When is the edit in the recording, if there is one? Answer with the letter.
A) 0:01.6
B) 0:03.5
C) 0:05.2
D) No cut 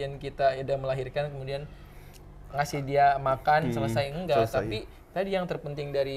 D